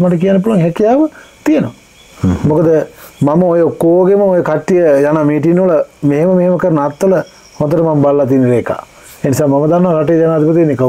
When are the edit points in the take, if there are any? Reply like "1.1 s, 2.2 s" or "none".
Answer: none